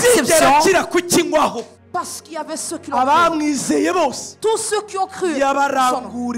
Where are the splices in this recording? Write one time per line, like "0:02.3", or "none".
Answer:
0:01.7

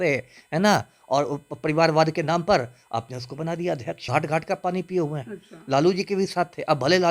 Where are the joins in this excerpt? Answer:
0:04.0

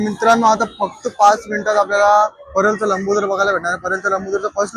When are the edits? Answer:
none

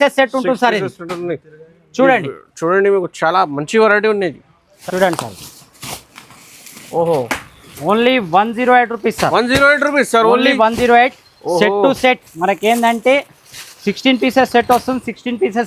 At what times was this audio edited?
0:04.5

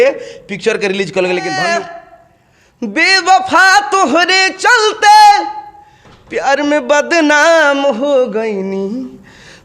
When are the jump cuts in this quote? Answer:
0:01.7

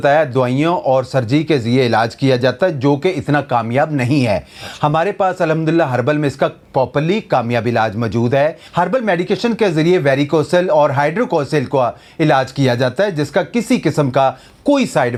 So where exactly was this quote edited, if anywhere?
none

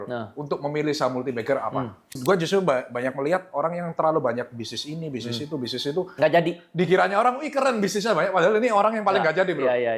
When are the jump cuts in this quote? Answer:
0:02.1

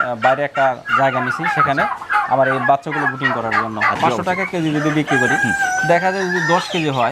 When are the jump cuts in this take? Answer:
0:04.0

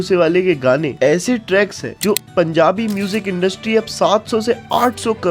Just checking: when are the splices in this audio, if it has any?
0:02.2

